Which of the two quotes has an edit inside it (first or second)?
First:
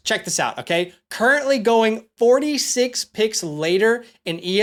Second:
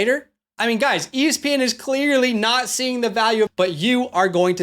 second